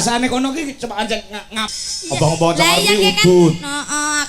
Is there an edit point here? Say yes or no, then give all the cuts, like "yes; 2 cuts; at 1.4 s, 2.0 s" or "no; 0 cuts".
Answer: yes; 1 cut; at 1.7 s